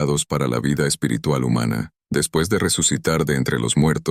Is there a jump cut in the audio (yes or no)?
yes